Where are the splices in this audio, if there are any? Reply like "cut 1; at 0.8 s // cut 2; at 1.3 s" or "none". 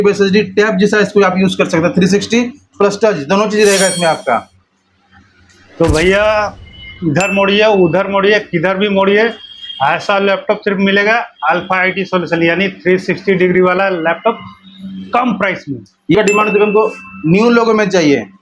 cut 1; at 16.1 s